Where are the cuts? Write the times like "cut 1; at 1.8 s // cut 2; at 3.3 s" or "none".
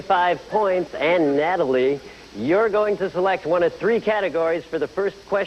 none